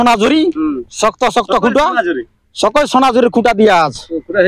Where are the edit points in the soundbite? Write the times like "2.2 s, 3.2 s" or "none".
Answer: none